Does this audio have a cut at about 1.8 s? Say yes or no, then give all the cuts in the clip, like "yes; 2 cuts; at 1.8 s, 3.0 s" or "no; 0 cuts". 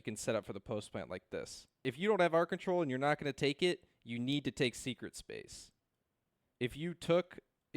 yes; 1 cut; at 1.8 s